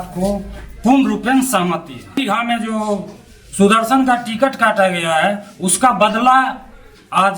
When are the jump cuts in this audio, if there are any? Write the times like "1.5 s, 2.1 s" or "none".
2.1 s